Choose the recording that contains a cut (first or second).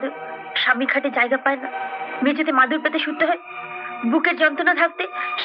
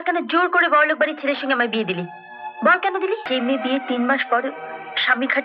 second